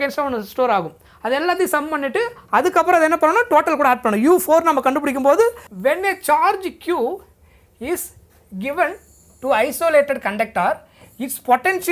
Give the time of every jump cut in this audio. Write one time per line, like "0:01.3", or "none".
0:05.6